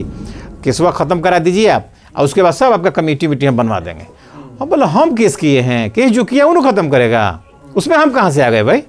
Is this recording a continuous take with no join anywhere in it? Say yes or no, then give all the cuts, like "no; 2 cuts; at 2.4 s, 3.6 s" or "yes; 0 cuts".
yes; 0 cuts